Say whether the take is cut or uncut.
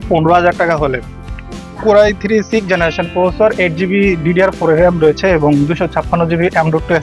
uncut